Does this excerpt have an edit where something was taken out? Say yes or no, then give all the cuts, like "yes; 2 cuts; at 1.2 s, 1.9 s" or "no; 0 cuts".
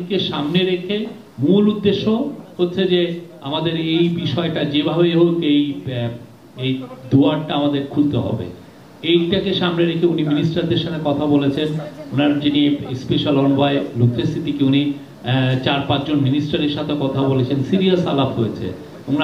no; 0 cuts